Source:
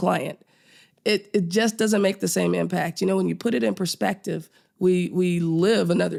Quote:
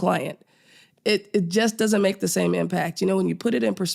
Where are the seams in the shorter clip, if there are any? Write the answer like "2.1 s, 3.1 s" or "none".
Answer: none